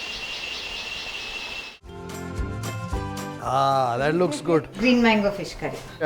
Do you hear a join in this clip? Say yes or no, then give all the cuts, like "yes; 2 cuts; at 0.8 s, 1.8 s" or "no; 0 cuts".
yes; 1 cut; at 1.9 s